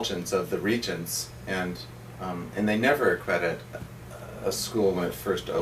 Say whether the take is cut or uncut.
cut